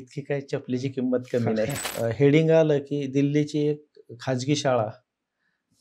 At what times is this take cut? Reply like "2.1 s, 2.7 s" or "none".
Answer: 1.8 s